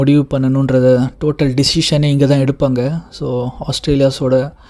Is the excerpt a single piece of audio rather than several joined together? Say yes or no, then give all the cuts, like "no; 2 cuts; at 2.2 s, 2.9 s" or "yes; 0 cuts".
yes; 0 cuts